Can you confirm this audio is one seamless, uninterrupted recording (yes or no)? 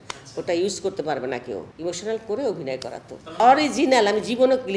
no